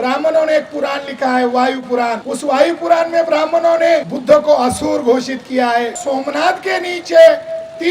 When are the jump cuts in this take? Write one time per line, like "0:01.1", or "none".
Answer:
0:02.3
0:04.1
0:06.0